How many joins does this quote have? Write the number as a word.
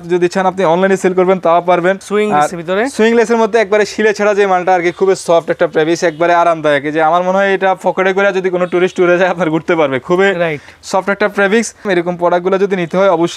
two